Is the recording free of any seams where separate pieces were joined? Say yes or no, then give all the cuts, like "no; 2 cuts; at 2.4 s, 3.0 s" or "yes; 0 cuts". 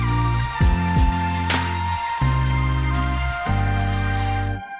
yes; 0 cuts